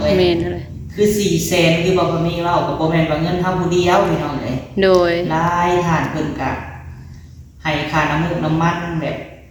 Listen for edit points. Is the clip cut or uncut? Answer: uncut